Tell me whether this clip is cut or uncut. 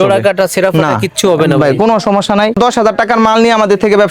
cut